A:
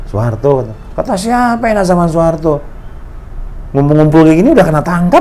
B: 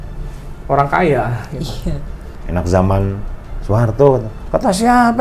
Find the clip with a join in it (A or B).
B